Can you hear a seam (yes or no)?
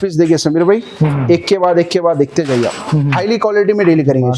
yes